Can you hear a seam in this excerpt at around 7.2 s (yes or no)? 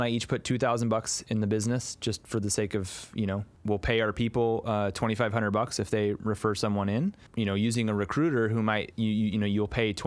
yes